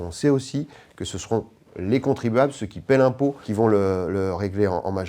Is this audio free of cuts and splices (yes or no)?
no